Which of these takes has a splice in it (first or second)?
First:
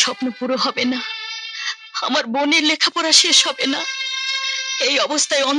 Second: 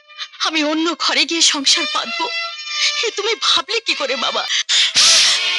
second